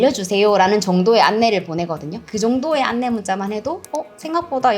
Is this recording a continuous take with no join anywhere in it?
no; 1 cut; at 2.2 s

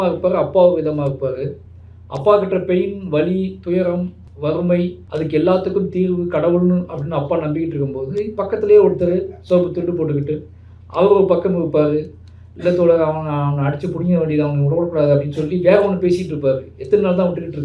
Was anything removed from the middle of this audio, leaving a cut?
yes; 2 cuts; at 4.2 s, 5.0 s

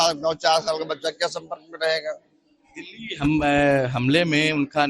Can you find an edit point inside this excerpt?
no; 0 cuts

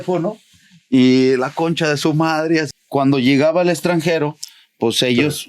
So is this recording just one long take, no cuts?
no; 1 cut; at 2.7 s

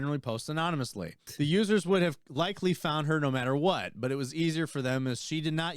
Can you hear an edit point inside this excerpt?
yes; 1 cut; at 1.2 s

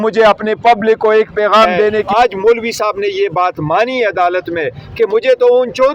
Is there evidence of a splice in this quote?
yes; 1 cut; at 2.1 s

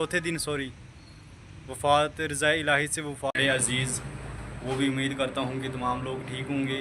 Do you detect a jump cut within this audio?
yes; 1 cut; at 3.3 s

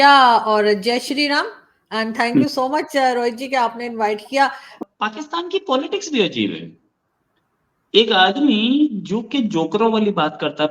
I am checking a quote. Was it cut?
yes; 1 cut; at 4.8 s

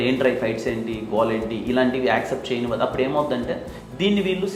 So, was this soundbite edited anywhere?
no; 0 cuts

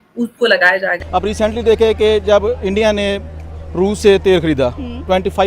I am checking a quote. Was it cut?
yes; 1 cut; at 1.0 s

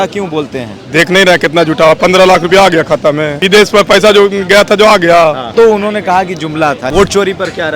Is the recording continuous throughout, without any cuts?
no; 3 cuts; at 3.3 s, 5.5 s, 6.8 s

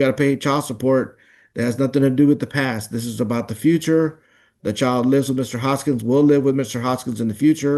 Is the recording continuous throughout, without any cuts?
yes; 0 cuts

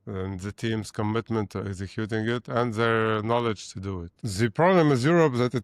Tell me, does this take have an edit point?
yes; 1 cut; at 4.2 s

